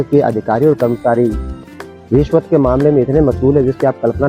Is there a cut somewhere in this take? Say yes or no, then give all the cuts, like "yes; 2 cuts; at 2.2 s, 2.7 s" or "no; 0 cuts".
no; 0 cuts